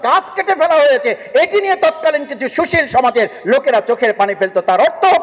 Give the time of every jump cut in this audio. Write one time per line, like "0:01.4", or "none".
none

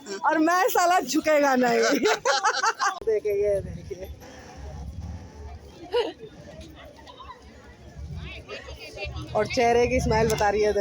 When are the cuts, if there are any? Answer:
0:03.0

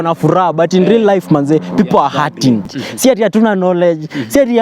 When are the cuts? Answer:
0:02.7

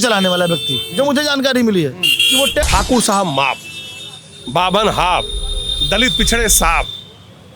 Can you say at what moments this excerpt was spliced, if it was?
0:02.7

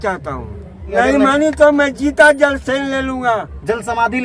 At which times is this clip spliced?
0:00.9

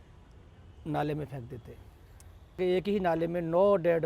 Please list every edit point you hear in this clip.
0:02.6

